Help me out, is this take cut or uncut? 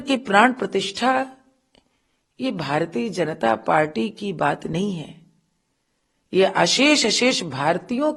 uncut